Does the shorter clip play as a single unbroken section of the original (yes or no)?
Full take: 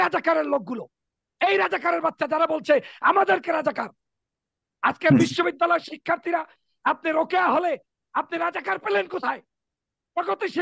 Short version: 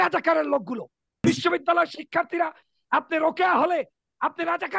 no